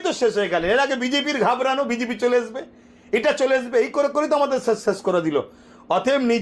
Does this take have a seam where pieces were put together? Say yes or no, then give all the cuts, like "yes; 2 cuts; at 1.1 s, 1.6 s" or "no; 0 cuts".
no; 0 cuts